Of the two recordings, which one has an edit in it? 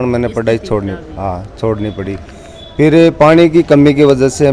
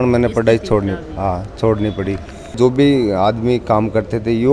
second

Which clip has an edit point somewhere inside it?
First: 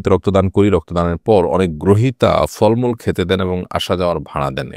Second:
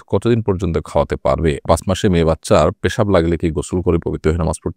second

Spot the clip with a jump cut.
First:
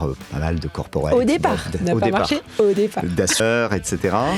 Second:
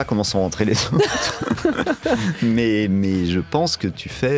first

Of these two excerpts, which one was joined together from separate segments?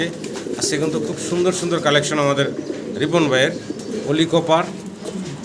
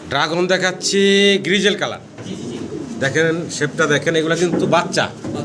first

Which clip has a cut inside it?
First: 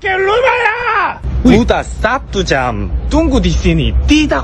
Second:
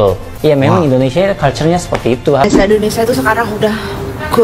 second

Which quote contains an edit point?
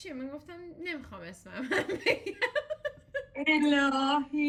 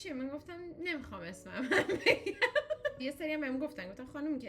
second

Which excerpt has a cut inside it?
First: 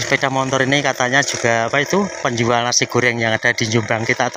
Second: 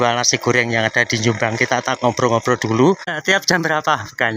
second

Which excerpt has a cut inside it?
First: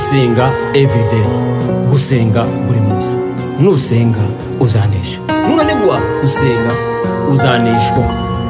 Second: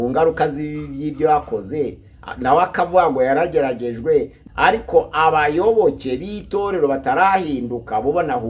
second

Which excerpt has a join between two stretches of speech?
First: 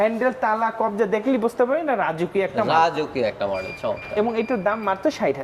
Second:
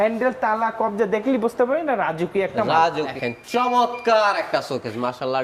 second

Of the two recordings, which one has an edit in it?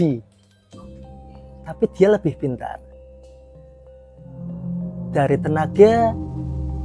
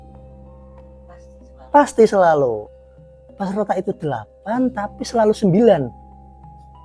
second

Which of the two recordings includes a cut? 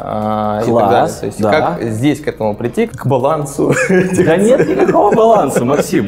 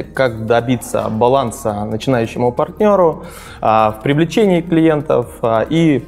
first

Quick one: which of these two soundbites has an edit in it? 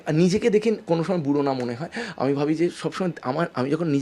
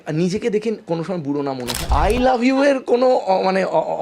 second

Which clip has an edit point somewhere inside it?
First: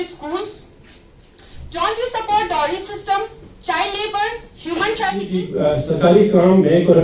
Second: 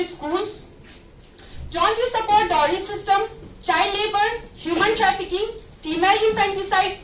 first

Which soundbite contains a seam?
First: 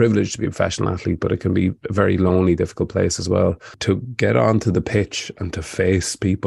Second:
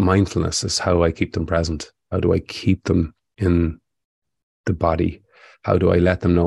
first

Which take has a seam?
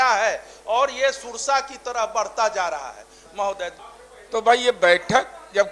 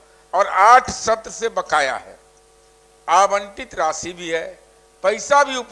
first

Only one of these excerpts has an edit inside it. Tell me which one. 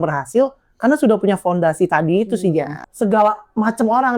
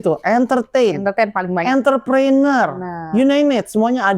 first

